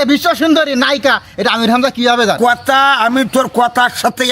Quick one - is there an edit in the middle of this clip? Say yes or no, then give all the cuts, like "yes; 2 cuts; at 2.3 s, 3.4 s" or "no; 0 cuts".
yes; 1 cut; at 2.4 s